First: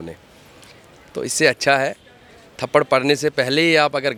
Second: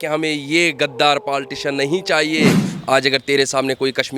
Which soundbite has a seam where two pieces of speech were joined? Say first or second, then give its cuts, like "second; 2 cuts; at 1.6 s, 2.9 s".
second; 1 cut; at 2.7 s